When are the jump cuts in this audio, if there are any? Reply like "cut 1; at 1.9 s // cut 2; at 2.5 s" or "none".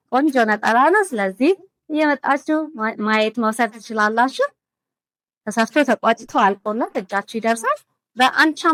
none